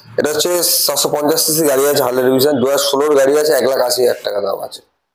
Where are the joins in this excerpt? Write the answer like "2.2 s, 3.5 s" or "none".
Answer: none

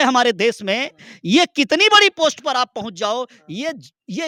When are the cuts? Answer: none

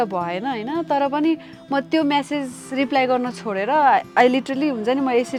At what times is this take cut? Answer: none

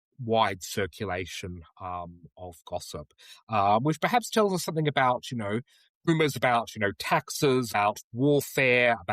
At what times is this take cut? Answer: 6.1 s, 7.7 s

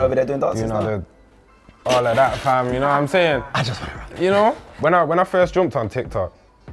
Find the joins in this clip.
none

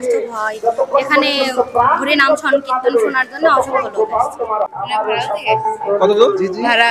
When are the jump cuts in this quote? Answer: 4.7 s

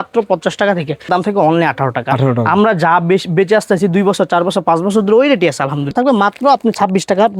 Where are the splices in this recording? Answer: 1.1 s, 5.9 s

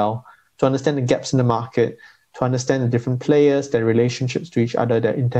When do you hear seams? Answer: none

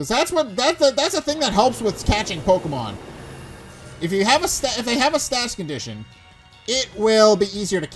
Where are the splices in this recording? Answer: none

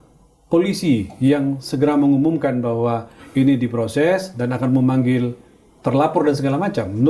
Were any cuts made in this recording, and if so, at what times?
none

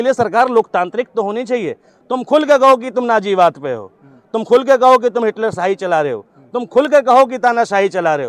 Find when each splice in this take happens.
none

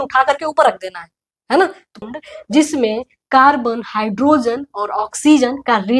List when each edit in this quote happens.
2.1 s

